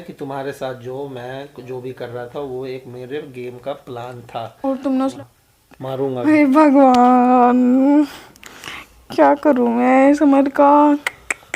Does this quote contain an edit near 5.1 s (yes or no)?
yes